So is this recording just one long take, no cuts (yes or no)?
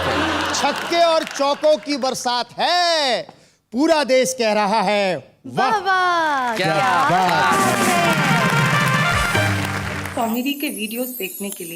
no